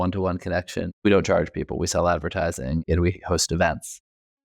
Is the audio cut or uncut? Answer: cut